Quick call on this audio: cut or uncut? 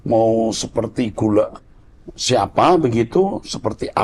uncut